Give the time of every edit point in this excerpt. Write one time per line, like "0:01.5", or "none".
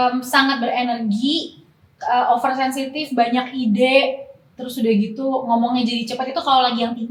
none